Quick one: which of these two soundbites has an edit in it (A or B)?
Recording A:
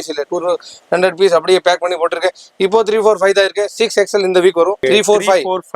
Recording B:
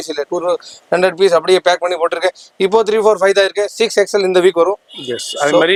A